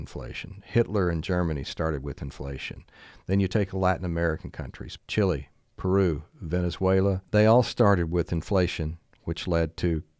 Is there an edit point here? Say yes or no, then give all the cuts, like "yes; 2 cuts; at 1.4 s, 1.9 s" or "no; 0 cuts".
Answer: yes; 1 cut; at 7.2 s